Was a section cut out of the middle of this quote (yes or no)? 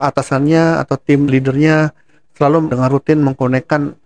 yes